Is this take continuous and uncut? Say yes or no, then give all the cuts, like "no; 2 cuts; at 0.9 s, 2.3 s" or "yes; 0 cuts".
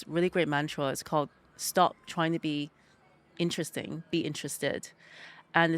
yes; 0 cuts